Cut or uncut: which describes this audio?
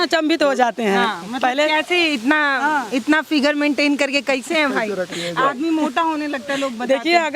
uncut